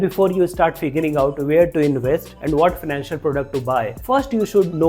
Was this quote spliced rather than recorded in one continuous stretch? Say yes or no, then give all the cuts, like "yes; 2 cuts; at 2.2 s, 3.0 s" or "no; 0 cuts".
yes; 2 cuts; at 2.3 s, 4.0 s